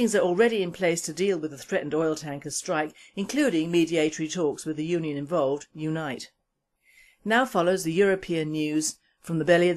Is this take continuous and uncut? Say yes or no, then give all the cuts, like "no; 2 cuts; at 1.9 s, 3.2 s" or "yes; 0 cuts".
yes; 0 cuts